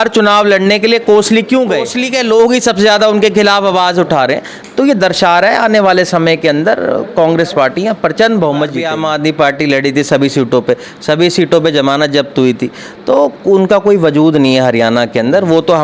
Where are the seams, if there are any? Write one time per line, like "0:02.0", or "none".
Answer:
0:02.0
0:08.8